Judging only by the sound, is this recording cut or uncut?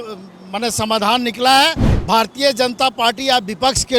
cut